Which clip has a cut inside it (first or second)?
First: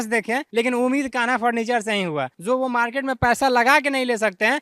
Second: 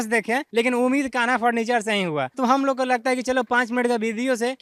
first